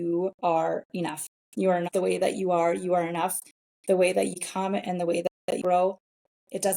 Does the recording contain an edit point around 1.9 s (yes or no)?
yes